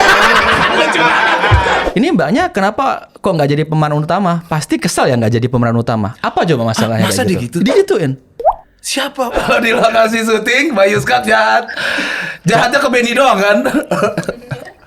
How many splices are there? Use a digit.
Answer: 2